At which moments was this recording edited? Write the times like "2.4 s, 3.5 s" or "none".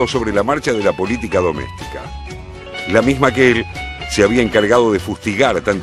1.9 s